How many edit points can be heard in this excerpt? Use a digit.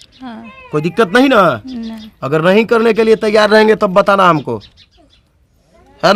0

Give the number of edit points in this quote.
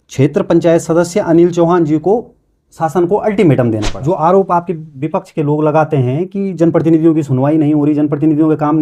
1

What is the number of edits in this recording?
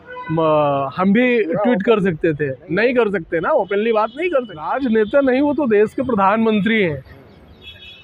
1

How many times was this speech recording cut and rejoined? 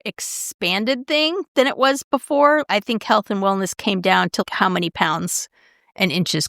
2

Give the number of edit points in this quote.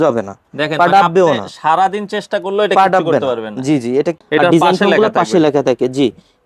1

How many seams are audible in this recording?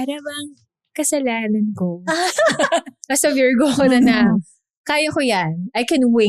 1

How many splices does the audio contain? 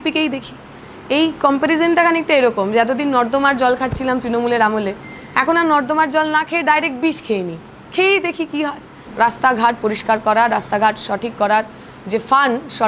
1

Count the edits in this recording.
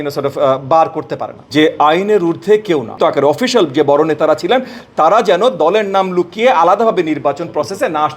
2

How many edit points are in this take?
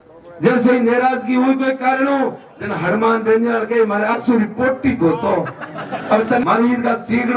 1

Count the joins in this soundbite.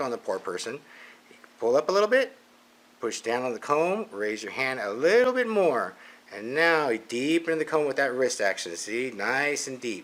0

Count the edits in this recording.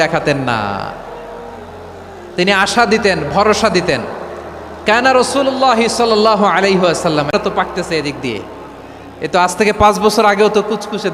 1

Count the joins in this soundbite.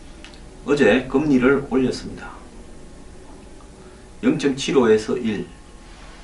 0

